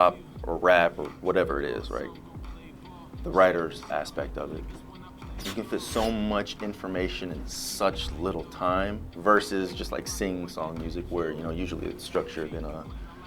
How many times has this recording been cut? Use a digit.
0